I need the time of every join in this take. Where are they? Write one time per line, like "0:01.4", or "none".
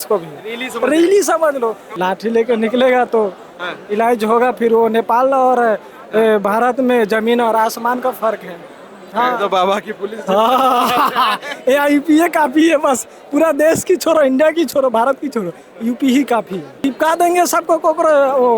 0:01.9
0:16.8